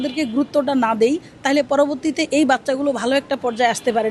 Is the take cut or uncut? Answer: uncut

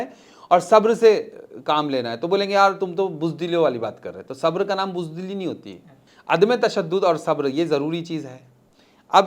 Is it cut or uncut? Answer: uncut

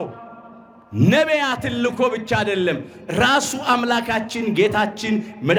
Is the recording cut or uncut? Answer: uncut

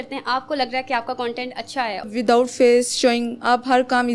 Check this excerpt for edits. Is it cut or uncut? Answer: cut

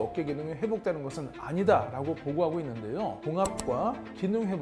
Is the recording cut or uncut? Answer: cut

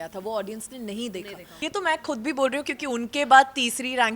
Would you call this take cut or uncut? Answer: cut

